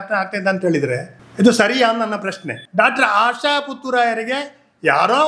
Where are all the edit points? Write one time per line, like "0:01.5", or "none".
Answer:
0:01.2
0:02.6